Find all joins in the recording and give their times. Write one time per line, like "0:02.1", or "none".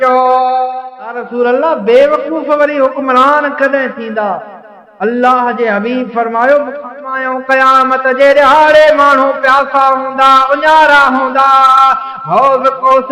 0:01.2
0:07.1